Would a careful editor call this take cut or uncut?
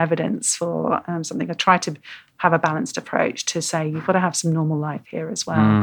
uncut